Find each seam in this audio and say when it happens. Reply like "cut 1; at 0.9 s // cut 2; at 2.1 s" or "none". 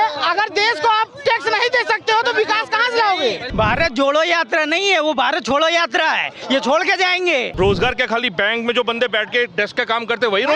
cut 1; at 3.4 s // cut 2; at 7.5 s